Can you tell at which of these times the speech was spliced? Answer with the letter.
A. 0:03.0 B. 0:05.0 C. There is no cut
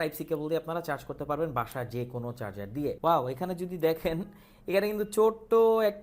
A